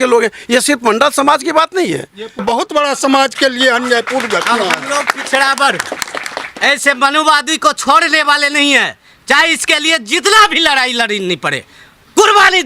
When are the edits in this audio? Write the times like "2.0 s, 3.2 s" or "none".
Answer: 2.4 s